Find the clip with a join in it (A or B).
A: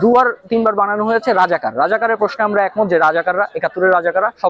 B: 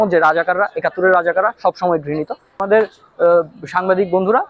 B